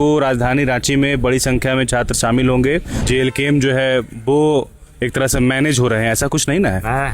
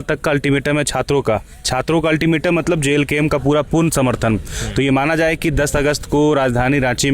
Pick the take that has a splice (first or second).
first